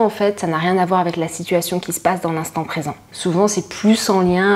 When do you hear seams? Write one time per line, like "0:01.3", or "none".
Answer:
0:03.0